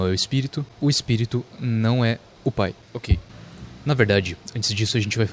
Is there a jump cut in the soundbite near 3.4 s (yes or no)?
yes